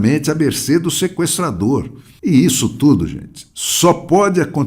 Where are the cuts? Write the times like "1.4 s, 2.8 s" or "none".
2.0 s